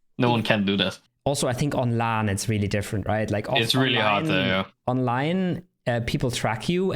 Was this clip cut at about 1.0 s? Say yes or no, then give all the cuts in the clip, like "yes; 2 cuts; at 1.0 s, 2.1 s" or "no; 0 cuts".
yes; 1 cut; at 1.0 s